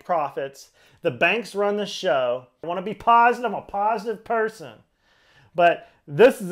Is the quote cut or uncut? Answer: cut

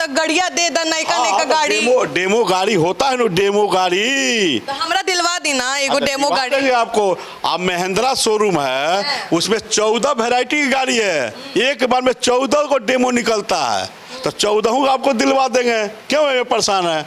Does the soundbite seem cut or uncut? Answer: uncut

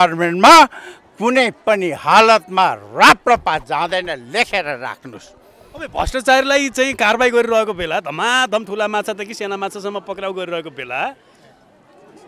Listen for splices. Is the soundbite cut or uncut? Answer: uncut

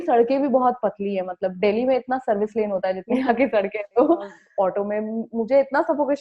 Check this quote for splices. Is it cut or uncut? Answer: cut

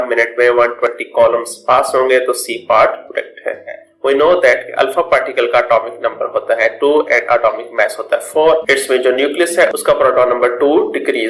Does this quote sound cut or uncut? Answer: cut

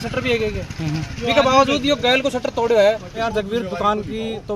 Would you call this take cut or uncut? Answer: cut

